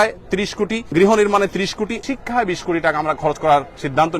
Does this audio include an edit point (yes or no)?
yes